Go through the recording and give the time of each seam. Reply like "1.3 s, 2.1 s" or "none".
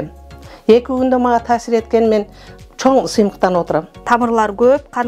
4.0 s